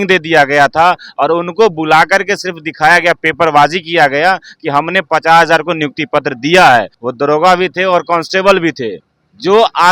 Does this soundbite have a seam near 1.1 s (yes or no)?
no